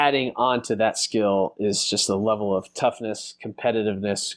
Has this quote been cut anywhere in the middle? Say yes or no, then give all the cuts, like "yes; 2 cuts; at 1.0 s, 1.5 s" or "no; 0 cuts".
no; 0 cuts